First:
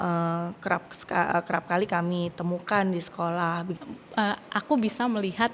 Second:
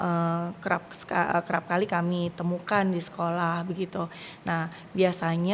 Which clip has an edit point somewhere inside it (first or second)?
first